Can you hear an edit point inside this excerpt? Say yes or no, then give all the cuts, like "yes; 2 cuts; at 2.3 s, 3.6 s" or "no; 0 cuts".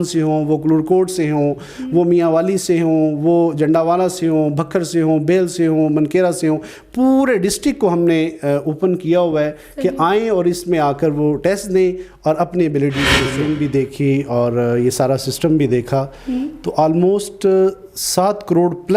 yes; 1 cut; at 13.3 s